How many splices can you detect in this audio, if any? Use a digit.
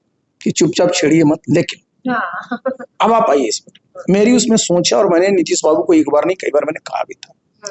0